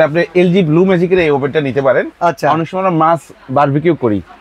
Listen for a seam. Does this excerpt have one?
yes; 1 cut; at 2.1 s

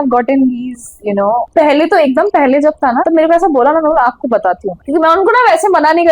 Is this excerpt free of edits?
no; 3 cuts; at 1.5 s, 3.1 s, 4.7 s

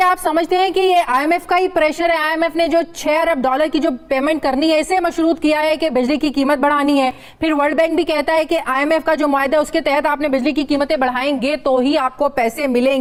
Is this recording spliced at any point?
no; 0 cuts

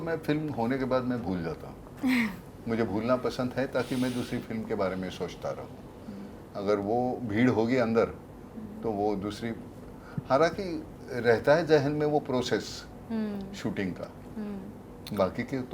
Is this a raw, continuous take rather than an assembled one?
yes; 0 cuts

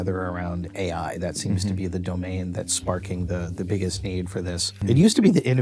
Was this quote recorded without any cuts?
no; 1 cut; at 4.7 s

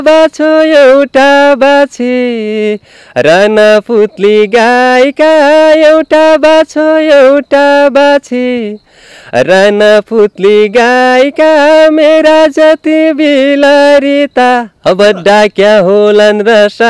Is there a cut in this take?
no; 0 cuts

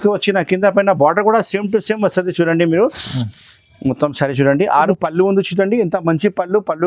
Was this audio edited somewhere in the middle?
yes; 1 cut; at 4.9 s

